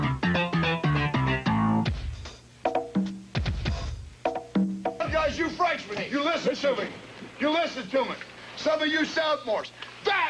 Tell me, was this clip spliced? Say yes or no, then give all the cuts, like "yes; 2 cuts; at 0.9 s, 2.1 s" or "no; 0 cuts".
no; 0 cuts